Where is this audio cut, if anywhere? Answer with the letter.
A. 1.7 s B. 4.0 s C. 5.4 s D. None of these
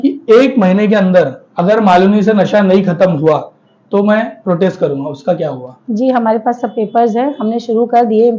D